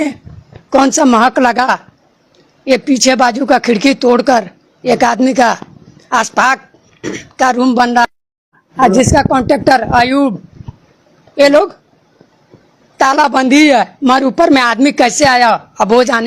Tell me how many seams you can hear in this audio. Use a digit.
1